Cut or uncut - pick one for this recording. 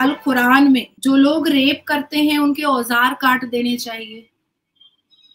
cut